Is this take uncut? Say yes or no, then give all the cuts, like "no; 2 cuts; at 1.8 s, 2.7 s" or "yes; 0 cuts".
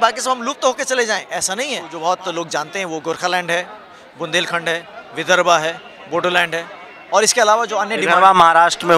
no; 1 cut; at 1.8 s